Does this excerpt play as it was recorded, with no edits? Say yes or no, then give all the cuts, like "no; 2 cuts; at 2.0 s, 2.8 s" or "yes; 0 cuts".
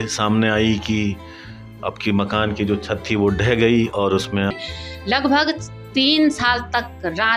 no; 1 cut; at 4.6 s